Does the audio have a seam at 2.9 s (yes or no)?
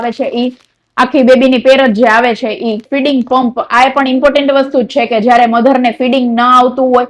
yes